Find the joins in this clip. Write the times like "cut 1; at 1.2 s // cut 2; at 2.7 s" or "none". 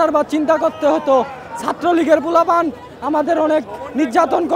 none